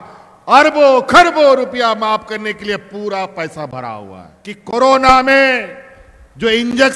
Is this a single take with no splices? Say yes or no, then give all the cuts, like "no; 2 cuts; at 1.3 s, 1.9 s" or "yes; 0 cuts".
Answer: no; 1 cut; at 4.7 s